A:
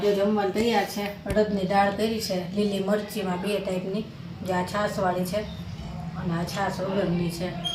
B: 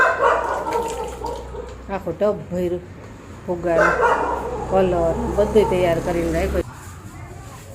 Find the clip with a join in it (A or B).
B